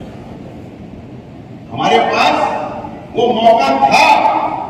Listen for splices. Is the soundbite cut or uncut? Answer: uncut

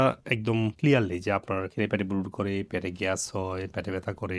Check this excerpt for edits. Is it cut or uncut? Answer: uncut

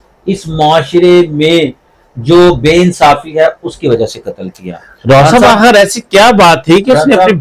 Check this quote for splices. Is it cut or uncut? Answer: uncut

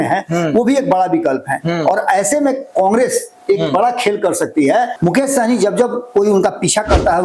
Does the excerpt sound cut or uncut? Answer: cut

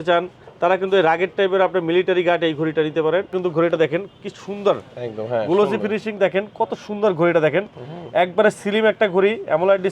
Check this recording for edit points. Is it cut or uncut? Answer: cut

